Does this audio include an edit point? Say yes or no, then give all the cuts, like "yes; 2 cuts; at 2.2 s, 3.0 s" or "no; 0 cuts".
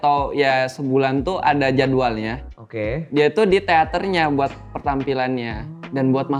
no; 0 cuts